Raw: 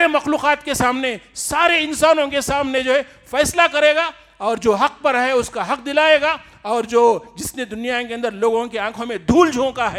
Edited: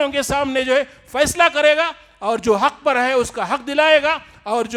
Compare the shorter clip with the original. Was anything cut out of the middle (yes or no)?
no